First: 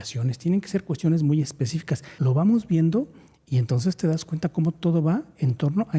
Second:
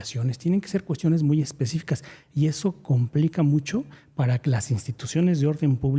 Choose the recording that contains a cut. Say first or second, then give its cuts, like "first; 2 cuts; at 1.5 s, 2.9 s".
first; 1 cut; at 2.1 s